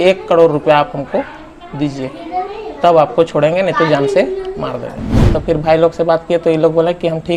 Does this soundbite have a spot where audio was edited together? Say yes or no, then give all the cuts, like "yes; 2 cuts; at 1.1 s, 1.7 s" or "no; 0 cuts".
yes; 1 cut; at 5.1 s